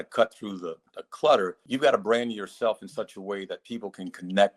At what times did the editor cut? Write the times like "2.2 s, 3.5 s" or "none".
1.6 s